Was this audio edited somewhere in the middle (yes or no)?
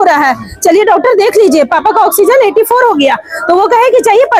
no